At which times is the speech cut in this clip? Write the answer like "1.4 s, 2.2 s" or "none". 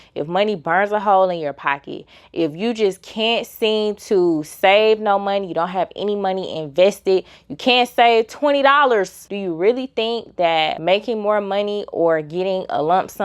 9.3 s